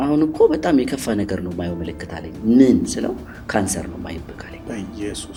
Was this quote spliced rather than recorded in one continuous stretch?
no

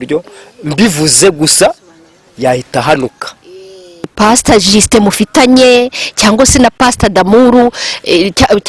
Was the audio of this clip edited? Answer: yes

